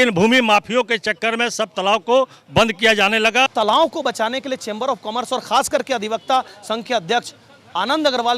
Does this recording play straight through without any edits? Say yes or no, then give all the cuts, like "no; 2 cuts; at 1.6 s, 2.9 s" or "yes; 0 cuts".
no; 1 cut; at 3.5 s